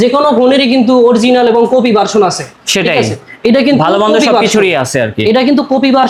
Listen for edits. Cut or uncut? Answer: uncut